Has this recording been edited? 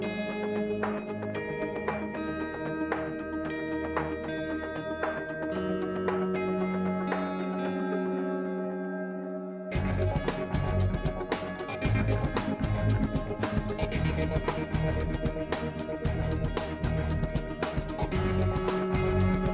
yes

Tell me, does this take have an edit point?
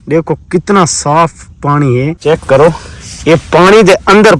yes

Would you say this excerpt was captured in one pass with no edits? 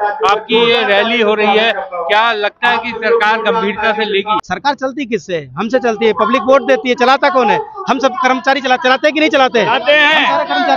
no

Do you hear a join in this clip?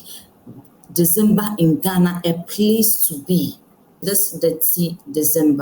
yes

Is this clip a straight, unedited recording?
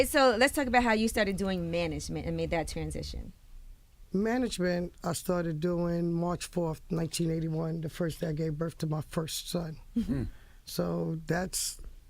no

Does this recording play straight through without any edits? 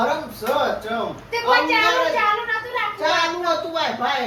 yes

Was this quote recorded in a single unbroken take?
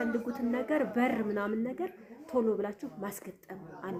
yes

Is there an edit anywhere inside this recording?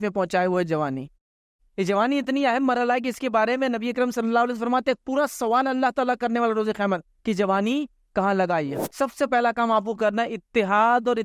yes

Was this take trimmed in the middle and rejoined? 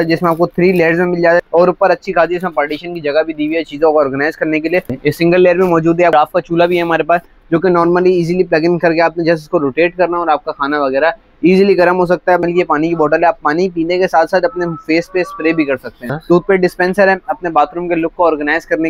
yes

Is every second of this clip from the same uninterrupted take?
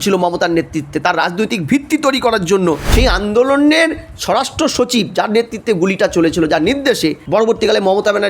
no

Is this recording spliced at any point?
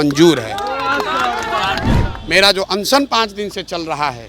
yes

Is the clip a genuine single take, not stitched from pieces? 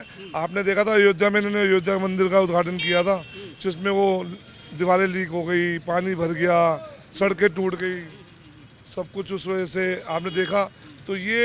yes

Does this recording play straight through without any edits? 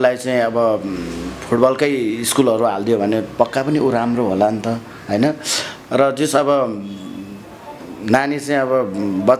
yes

